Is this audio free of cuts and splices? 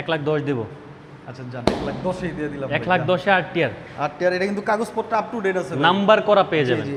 yes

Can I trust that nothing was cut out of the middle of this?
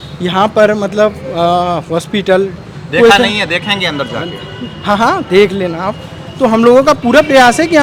yes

